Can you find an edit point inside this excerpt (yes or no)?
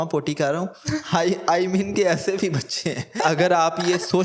yes